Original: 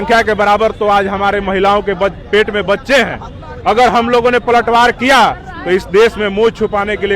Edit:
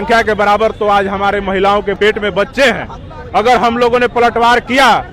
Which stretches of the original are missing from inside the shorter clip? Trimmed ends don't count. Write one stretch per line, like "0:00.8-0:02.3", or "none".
0:02.0-0:02.3